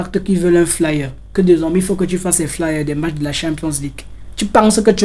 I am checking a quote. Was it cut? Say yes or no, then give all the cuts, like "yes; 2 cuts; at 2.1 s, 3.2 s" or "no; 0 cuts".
no; 0 cuts